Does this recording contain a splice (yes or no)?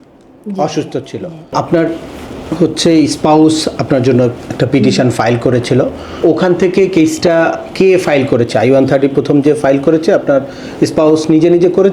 yes